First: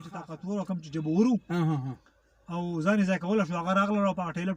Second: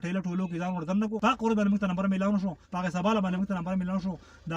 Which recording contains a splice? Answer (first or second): second